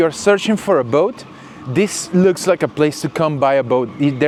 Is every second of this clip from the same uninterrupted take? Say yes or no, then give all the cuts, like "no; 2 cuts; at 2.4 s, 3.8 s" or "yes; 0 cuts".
yes; 0 cuts